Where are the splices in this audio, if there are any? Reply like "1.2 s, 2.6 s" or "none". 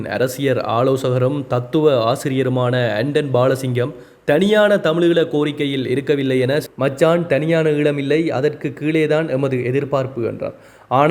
6.7 s